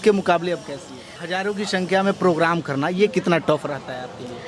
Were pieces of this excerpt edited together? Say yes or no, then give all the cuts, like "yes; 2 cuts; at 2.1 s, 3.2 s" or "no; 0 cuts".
yes; 1 cut; at 1.1 s